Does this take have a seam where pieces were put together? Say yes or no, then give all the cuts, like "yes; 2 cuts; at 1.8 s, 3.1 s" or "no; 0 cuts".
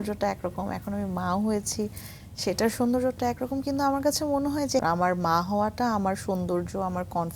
yes; 1 cut; at 4.8 s